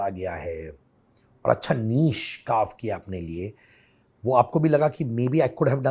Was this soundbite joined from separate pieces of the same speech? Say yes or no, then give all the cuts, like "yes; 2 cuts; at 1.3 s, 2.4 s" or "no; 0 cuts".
no; 0 cuts